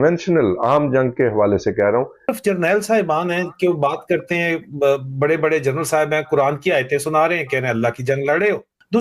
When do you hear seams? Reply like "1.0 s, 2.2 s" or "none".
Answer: 2.3 s